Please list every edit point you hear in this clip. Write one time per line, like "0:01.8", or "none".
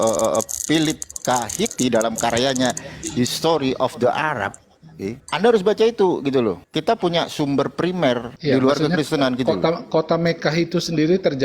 0:05.2
0:06.7
0:08.3